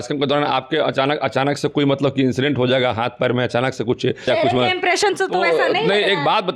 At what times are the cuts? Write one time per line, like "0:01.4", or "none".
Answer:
0:04.3